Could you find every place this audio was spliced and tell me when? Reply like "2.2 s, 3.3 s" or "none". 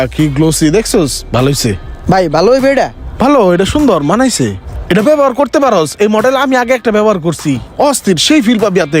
1.9 s